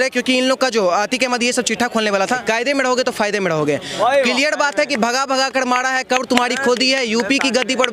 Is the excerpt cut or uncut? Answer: cut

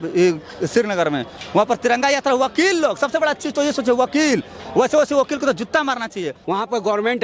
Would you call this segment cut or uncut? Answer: cut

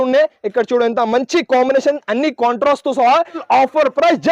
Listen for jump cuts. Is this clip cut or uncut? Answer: cut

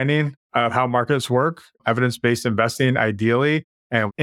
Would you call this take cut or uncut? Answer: uncut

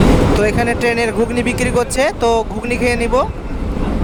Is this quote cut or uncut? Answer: uncut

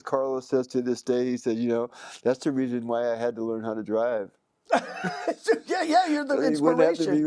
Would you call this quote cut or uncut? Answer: uncut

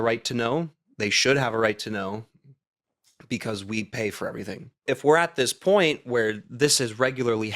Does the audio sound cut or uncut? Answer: cut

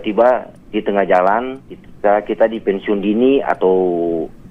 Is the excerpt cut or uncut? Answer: uncut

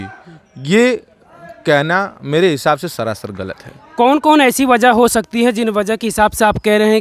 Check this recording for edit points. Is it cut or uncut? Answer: uncut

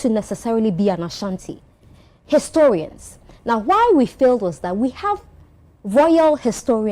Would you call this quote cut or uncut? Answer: uncut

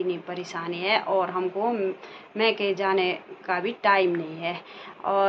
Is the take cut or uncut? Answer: uncut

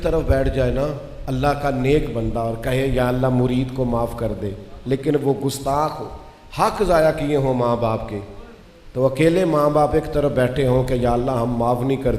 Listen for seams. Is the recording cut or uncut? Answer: cut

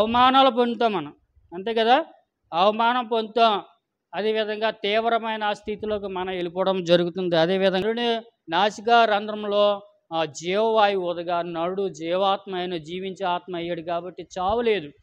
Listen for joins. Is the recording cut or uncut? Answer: cut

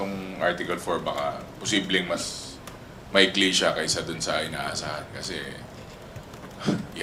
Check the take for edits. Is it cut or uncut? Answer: uncut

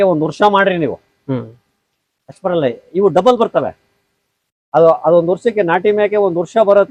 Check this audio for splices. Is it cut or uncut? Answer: uncut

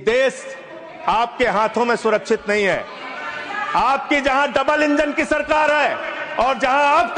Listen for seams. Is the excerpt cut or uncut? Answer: uncut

